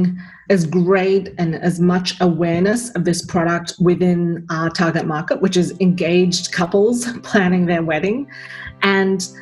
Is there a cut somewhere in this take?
no; 0 cuts

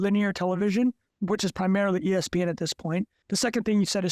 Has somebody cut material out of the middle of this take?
yes; 2 cuts; at 1.1 s, 3.2 s

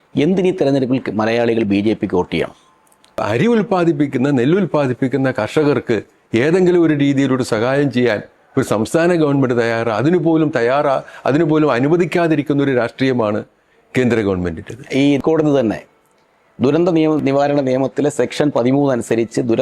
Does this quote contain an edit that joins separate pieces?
yes; 3 cuts; at 3.2 s, 15.2 s, 17.2 s

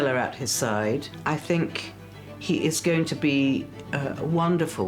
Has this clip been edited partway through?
yes; 1 cut; at 1.1 s

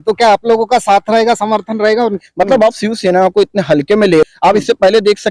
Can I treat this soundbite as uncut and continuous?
no; 2 cuts; at 2.2 s, 4.2 s

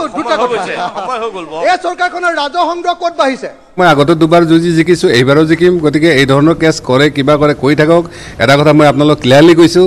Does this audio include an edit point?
yes; 1 cut; at 3.8 s

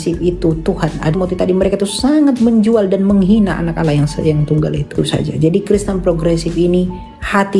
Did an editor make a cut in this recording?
yes; 2 cuts; at 1.1 s, 5.0 s

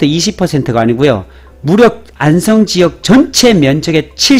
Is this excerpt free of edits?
yes; 0 cuts

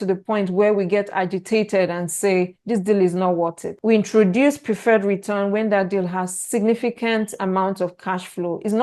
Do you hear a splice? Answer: no; 0 cuts

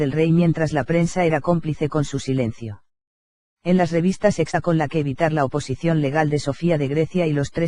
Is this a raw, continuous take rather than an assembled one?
yes; 0 cuts

